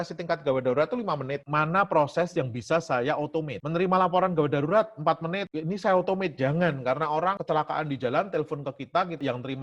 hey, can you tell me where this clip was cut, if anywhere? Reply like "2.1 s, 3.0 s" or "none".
1.4 s, 7.4 s